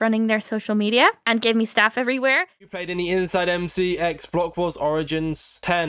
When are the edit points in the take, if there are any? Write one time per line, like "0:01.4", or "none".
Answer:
0:02.5